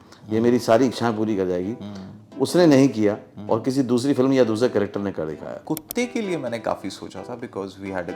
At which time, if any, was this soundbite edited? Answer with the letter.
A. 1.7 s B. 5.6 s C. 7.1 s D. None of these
B